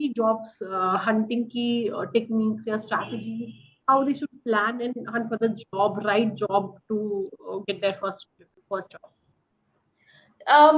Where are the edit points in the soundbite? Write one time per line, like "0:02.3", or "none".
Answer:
none